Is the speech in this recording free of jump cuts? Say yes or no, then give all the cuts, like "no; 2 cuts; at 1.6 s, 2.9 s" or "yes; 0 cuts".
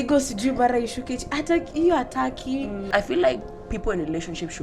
no; 1 cut; at 2.8 s